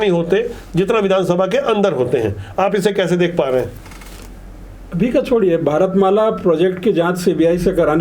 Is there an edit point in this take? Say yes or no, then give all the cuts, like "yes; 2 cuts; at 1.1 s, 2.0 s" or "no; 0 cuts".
no; 0 cuts